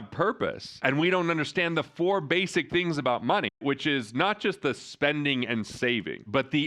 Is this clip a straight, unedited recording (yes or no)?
yes